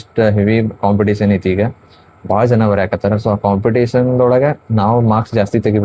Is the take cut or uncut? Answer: uncut